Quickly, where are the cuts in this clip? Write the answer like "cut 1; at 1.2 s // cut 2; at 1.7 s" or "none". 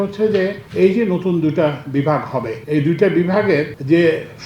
cut 1; at 2.6 s